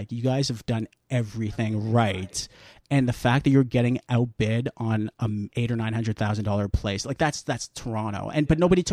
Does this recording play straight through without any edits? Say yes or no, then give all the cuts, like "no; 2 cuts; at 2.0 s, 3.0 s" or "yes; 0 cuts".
no; 1 cut; at 5.5 s